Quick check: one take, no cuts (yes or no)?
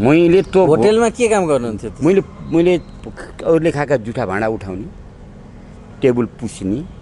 yes